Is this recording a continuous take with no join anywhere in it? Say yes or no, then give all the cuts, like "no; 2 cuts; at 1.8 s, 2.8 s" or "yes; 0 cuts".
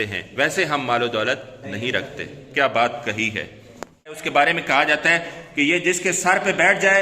no; 1 cut; at 4.2 s